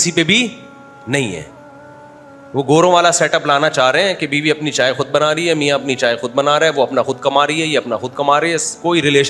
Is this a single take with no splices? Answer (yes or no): yes